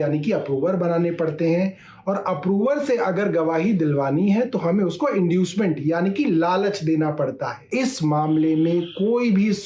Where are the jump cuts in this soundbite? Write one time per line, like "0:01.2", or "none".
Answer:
0:07.6